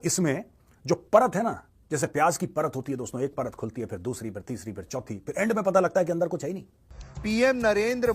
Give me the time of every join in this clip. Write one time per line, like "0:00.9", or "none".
0:06.8